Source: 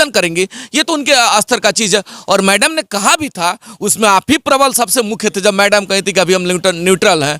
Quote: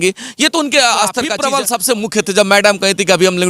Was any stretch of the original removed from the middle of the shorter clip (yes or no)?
yes